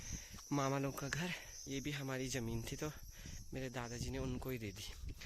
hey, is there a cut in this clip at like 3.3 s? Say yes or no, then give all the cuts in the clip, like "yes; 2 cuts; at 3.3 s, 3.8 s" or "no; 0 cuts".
no; 1 cut; at 1.5 s